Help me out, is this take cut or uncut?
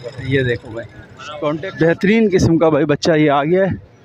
cut